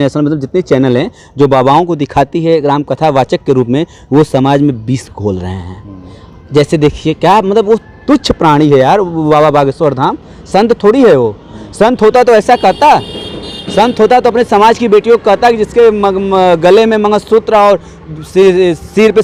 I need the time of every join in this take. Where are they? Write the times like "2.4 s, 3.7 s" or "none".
none